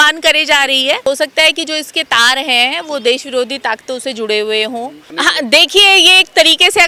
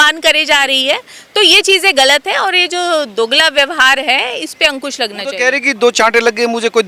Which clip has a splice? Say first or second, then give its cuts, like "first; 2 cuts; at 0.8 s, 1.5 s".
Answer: first; 2 cuts; at 1.0 s, 5.0 s